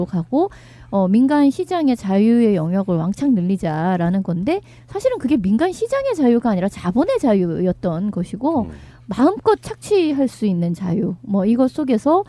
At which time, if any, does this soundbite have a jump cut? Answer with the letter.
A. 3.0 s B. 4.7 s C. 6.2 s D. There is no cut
D